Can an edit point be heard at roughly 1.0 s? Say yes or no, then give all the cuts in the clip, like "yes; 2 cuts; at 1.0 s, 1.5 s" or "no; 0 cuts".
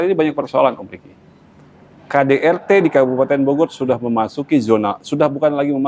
no; 0 cuts